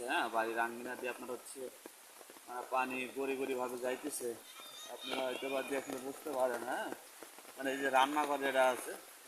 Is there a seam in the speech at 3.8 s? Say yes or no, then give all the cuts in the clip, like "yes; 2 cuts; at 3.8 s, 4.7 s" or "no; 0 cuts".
no; 0 cuts